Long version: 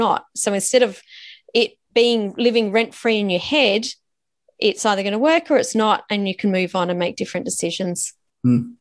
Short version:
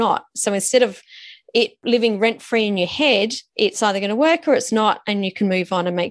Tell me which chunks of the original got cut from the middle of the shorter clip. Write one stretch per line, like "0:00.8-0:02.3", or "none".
0:01.8-0:02.3
0:03.9-0:04.5